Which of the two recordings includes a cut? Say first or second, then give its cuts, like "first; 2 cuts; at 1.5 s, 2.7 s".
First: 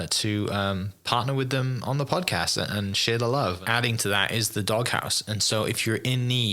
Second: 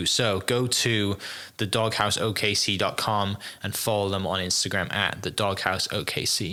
first; 1 cut; at 3.6 s